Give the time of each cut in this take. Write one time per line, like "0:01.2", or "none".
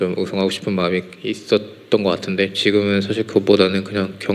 none